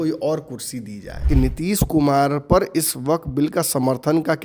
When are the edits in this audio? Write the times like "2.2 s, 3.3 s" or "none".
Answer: 1.3 s